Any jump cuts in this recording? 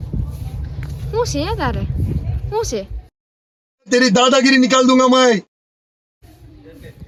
no; 0 cuts

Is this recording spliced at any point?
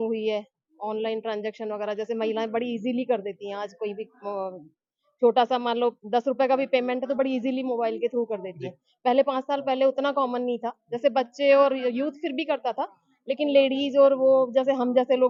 no; 0 cuts

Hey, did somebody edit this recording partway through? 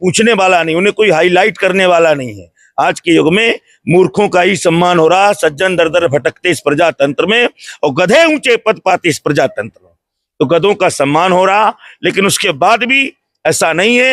no; 0 cuts

